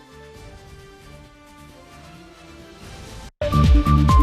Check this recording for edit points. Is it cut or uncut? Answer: cut